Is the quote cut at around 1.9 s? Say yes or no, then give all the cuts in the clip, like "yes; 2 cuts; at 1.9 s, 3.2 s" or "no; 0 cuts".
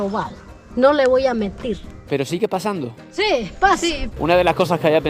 yes; 2 cuts; at 1.9 s, 4.1 s